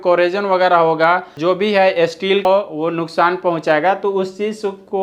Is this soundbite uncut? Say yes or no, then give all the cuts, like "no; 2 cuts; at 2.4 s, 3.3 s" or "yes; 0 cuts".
no; 2 cuts; at 1.3 s, 2.4 s